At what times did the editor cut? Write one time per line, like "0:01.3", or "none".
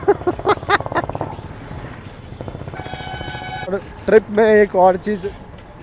0:03.7